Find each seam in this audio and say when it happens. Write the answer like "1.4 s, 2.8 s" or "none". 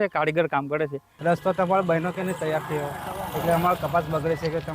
1.1 s